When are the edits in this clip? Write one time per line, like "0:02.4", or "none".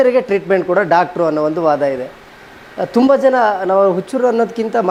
none

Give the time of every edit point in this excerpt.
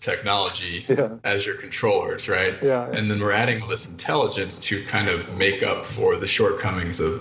0:06.2

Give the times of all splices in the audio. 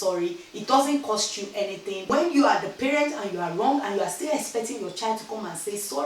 0:01.9

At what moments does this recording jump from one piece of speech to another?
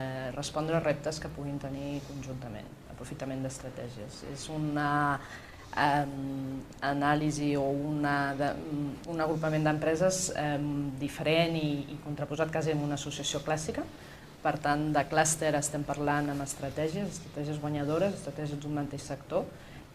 0:17.9

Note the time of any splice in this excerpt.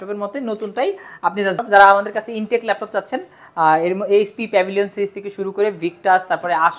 0:01.6

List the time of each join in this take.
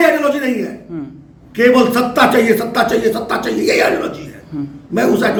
none

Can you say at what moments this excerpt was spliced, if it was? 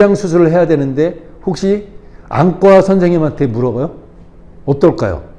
none

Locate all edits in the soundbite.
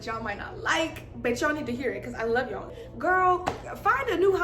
0:02.8

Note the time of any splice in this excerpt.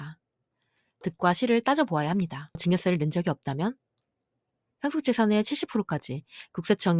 0:00.9
0:02.6
0:04.6

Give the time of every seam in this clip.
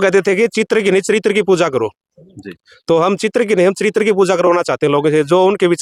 none

